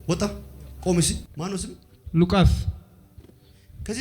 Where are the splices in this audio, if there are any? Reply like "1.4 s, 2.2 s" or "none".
1.3 s